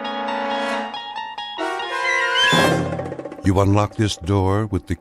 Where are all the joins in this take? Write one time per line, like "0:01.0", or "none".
0:03.3